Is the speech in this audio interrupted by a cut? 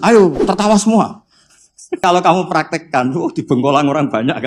yes; 1 cut; at 2.0 s

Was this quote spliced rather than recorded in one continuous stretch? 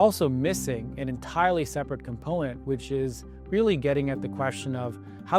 no; 0 cuts

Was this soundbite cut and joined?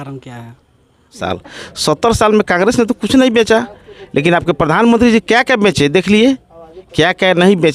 yes; 1 cut; at 1.2 s

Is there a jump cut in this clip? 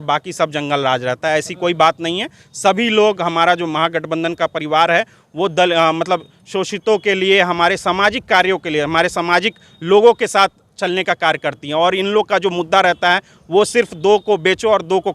no; 0 cuts

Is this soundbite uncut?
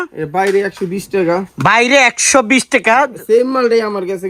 yes; 0 cuts

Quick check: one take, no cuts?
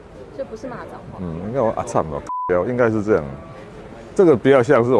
yes; 0 cuts

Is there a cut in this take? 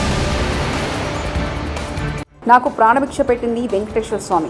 yes; 1 cut; at 2.3 s

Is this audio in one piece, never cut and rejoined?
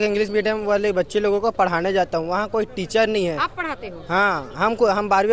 yes; 0 cuts

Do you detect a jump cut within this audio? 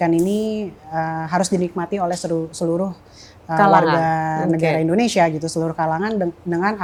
no; 0 cuts

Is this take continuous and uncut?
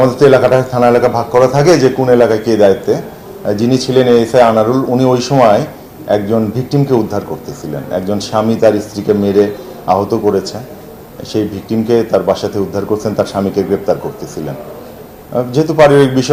yes; 0 cuts

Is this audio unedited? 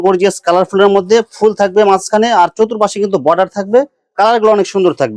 yes; 0 cuts

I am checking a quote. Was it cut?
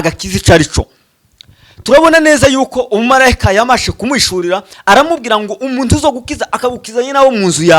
no; 0 cuts

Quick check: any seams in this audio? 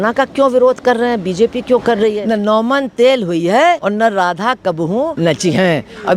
yes; 3 cuts; at 2.2 s, 3.8 s, 5.1 s

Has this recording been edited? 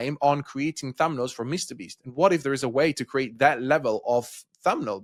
no; 0 cuts

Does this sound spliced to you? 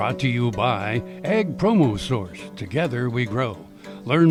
no; 0 cuts

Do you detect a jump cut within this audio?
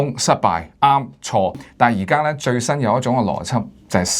yes; 1 cut; at 1.6 s

